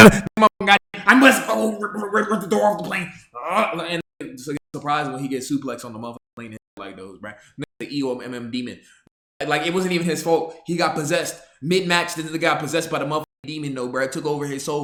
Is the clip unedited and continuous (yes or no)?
yes